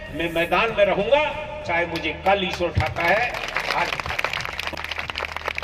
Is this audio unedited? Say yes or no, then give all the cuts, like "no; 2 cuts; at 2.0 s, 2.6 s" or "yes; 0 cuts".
yes; 0 cuts